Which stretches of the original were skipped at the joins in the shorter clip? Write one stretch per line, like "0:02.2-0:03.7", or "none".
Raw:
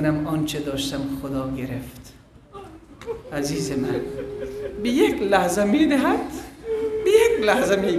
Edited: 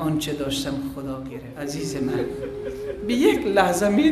0:01.7-0:03.2